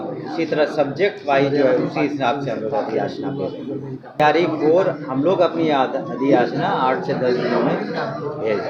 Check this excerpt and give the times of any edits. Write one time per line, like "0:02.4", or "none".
0:04.2